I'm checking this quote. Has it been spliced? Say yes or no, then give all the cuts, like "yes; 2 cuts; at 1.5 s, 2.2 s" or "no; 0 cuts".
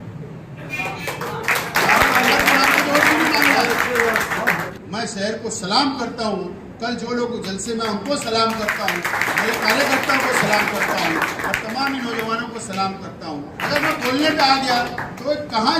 yes; 2 cuts; at 4.6 s, 13.6 s